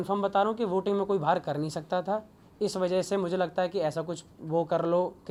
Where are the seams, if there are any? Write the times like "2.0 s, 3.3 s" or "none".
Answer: none